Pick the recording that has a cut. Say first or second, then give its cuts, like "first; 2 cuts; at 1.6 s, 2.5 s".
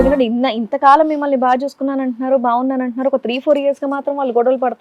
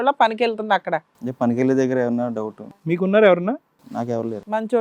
second; 1 cut; at 2.8 s